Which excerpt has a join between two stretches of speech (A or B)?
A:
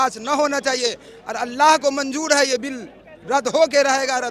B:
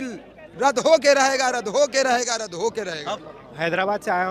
B